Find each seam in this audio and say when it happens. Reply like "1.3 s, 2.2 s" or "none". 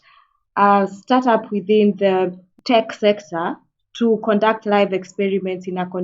2.5 s